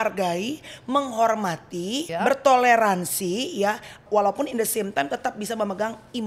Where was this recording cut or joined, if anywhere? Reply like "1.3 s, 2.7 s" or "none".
2.0 s, 4.0 s